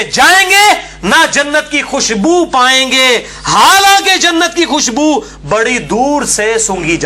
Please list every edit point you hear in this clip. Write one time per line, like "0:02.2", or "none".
none